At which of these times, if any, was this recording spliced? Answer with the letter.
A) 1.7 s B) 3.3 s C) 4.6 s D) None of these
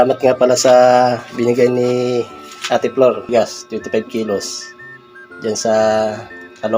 B